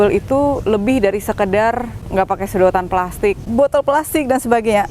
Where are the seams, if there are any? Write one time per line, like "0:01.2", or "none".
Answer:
0:01.9
0:03.4